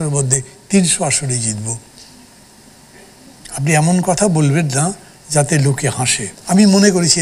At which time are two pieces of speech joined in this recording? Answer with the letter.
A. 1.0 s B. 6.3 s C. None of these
B